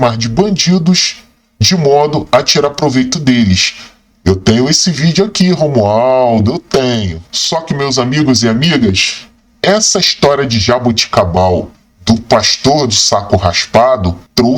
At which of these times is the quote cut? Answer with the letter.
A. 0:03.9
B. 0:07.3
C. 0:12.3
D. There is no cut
B